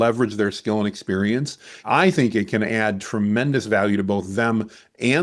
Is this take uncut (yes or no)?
no